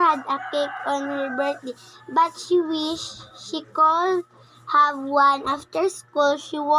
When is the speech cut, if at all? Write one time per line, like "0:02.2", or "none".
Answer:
0:04.3